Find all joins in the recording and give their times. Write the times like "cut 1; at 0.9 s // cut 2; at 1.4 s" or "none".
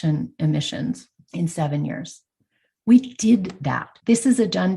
cut 1; at 1.2 s